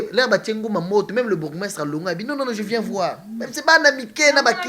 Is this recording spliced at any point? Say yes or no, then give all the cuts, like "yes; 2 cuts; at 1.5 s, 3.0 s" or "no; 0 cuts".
no; 0 cuts